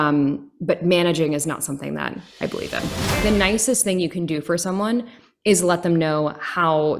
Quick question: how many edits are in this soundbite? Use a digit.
1